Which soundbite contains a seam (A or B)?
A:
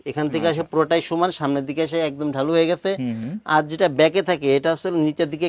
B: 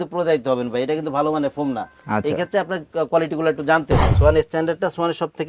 B